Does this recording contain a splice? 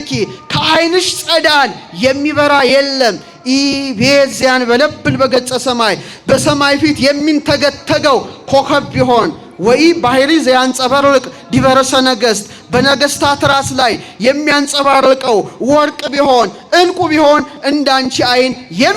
no; 0 cuts

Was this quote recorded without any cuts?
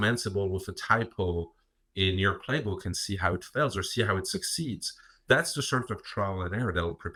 yes; 0 cuts

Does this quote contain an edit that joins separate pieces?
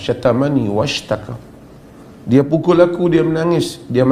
no; 0 cuts

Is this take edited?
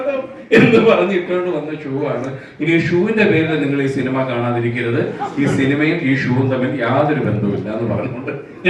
no; 0 cuts

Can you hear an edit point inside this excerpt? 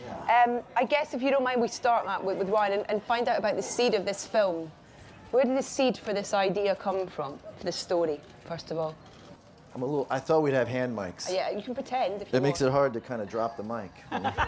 yes; 1 cut; at 11.2 s

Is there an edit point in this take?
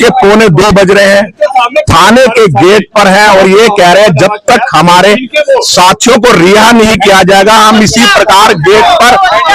no; 0 cuts

